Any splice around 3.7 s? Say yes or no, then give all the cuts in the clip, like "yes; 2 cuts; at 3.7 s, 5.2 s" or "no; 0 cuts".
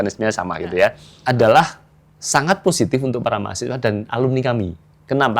no; 1 cut; at 1.1 s